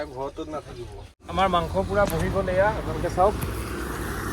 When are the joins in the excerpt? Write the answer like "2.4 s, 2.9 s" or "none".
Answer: 1.2 s